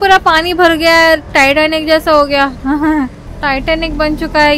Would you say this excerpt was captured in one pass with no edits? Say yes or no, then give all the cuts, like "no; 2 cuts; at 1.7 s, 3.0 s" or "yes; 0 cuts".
yes; 0 cuts